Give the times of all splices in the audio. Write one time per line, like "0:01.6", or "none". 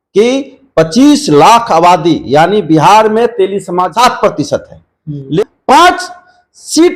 0:03.9
0:05.4